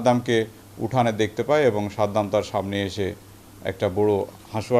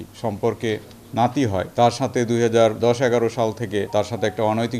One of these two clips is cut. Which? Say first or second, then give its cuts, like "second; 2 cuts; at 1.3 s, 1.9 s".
second; 3 cuts; at 1.7 s, 2.8 s, 3.9 s